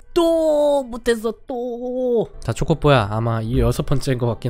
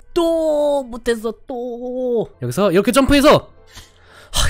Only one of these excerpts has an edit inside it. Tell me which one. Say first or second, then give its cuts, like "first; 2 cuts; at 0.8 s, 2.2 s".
second; 1 cut; at 2.4 s